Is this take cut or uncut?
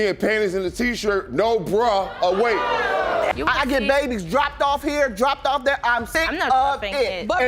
cut